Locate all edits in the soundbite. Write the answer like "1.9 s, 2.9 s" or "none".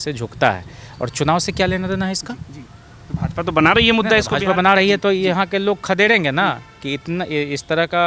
none